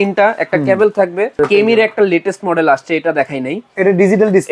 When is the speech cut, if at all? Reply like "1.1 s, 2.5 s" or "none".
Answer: 1.4 s